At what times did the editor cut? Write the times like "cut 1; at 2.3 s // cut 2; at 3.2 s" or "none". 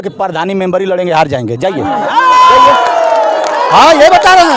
none

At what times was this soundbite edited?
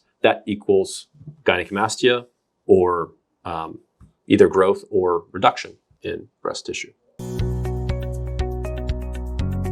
cut 1; at 7.1 s

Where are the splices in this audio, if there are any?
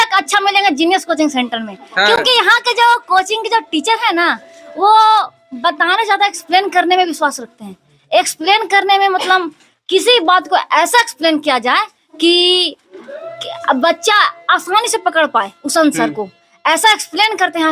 none

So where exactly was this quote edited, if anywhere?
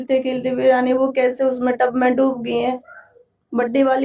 none

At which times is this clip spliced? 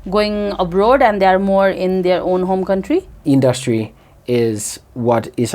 cut 1; at 3.2 s

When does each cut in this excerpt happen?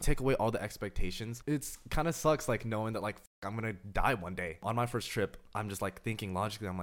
cut 1; at 1.3 s // cut 2; at 4.6 s

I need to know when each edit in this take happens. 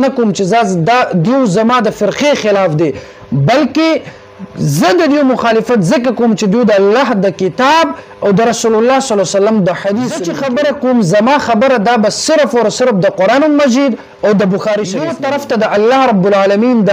cut 1; at 10.3 s // cut 2; at 15.2 s

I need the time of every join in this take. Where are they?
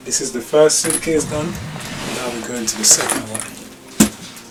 none

